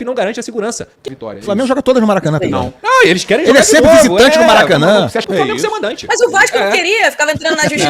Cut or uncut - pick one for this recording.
cut